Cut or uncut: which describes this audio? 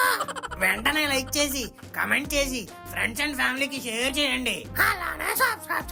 uncut